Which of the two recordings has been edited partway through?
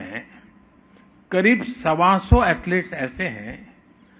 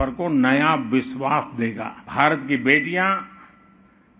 second; 1 cut; at 1.9 s

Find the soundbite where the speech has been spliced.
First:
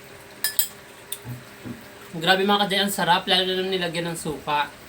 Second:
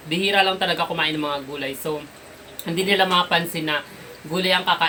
first; 1 cut; at 2.1 s

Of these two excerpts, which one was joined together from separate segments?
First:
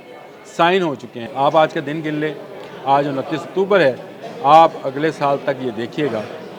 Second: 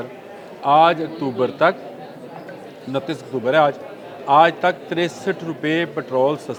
first; 1 cut; at 1.1 s

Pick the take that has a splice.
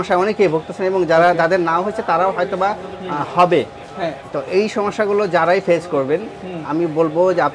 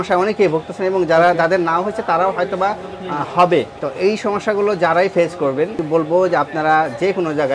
second; 2 cuts; at 3.8 s, 5.8 s

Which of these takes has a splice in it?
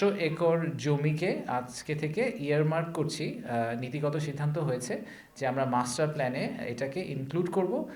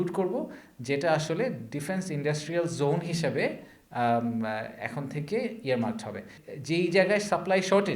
second; 1 cut; at 6.2 s

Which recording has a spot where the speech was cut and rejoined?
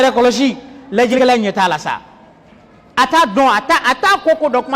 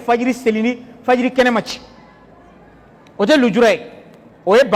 first; 1 cut; at 1.1 s

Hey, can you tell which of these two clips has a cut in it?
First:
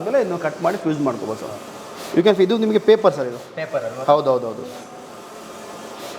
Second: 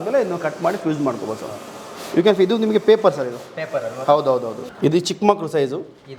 second; 1 cut; at 4.6 s

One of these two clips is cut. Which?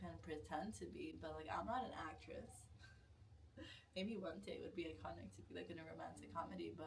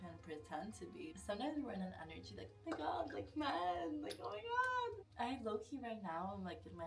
second; 2 cuts; at 1.2 s, 5.0 s

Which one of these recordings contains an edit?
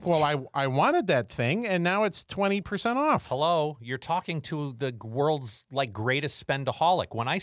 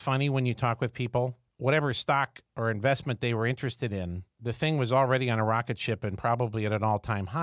second; 3 cuts; at 1.4 s, 2.4 s, 4.3 s

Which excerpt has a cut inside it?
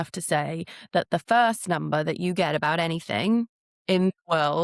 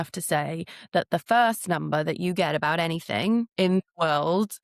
second; 1 cut; at 3.5 s

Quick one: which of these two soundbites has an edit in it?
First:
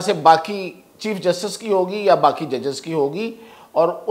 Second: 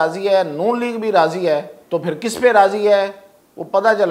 second; 1 cut; at 1.8 s

